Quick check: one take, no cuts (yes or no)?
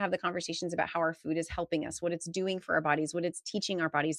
yes